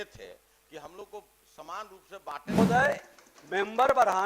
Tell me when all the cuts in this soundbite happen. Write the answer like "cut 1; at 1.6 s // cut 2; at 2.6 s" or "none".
cut 1; at 2.6 s